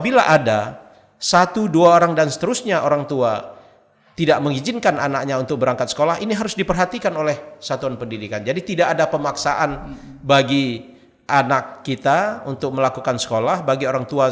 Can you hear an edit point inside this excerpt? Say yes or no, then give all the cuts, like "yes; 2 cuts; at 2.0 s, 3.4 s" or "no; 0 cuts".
no; 0 cuts